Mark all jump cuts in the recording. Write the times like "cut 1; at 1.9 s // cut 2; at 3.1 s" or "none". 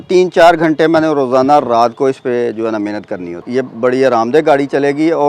cut 1; at 3.4 s